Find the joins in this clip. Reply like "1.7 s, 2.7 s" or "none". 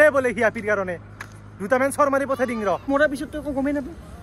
2.9 s

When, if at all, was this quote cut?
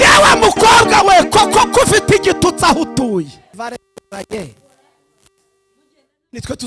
3.6 s

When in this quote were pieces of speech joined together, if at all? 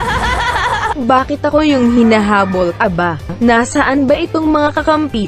3.3 s

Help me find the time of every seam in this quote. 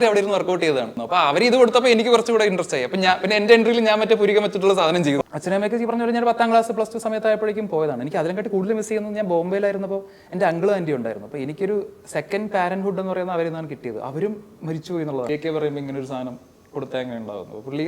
1.0 s, 5.2 s, 15.3 s

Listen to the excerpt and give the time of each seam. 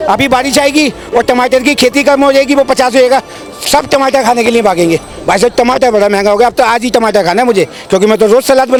none

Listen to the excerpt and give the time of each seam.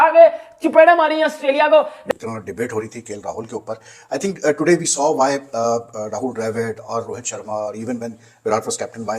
2.0 s

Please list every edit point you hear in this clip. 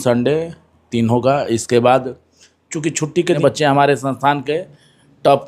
3.4 s

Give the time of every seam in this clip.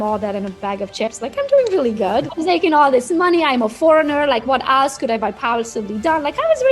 2.3 s

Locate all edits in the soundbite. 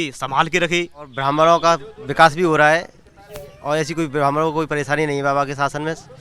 1.1 s

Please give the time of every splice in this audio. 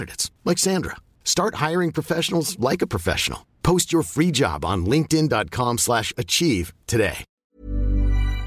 7.4 s

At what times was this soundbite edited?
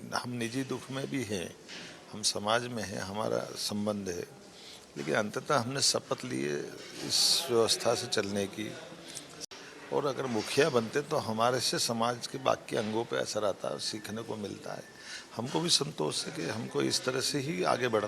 9.3 s

